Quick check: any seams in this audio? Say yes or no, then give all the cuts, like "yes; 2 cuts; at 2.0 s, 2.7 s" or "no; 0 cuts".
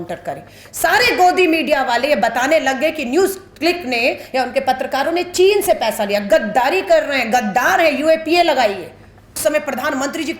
yes; 1 cut; at 9.4 s